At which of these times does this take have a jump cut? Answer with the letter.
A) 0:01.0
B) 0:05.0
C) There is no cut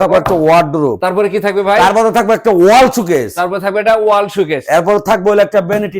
A